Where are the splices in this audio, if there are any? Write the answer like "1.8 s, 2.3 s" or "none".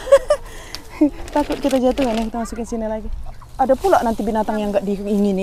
3.4 s